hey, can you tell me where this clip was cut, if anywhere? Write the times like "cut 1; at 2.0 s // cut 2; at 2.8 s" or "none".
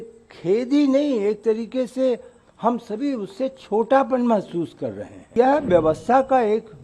cut 1; at 5.3 s